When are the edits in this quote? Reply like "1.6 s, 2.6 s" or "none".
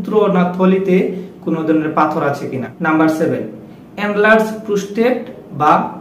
none